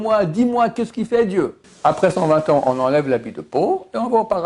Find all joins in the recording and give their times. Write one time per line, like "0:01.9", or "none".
0:01.6